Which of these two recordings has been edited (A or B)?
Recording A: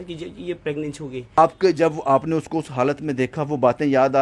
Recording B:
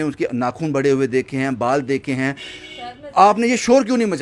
A